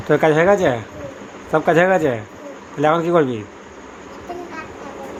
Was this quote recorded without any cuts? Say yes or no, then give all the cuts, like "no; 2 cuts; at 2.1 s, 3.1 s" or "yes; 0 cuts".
yes; 0 cuts